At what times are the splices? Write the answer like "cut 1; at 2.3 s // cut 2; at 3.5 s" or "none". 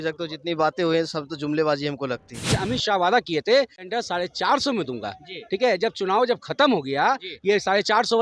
cut 1; at 2.6 s // cut 2; at 7.3 s